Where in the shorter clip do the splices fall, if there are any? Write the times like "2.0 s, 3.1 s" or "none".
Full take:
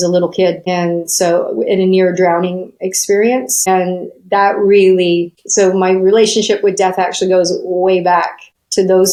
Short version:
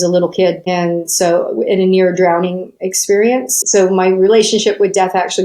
3.5 s